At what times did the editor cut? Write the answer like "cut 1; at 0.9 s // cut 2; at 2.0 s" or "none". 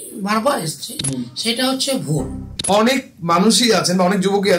cut 1; at 2.6 s